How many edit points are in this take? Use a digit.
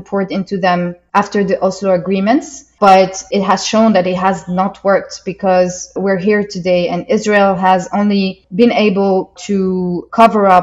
4